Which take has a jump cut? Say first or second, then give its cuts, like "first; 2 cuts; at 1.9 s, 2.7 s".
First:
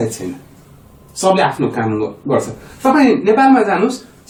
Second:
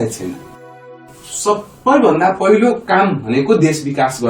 second; 1 cut; at 1.1 s